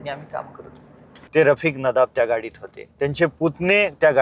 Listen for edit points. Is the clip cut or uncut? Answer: cut